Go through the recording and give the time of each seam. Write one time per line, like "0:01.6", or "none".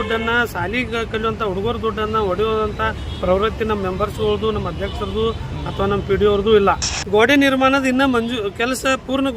0:06.9